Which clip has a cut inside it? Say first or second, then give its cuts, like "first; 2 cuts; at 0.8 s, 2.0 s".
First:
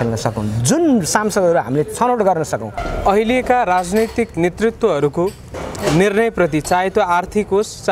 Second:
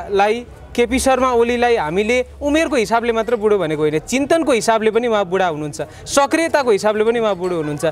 first; 1 cut; at 2.8 s